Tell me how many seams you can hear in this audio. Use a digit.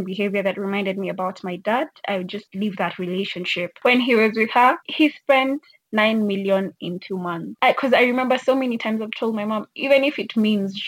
3